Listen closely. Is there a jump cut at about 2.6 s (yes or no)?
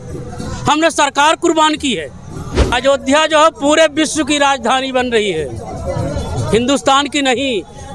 yes